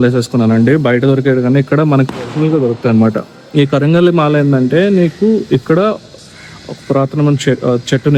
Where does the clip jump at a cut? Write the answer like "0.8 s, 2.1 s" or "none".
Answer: none